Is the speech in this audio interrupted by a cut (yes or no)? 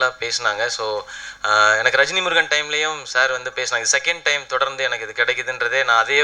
no